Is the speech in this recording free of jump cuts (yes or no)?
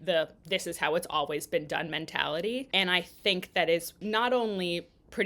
no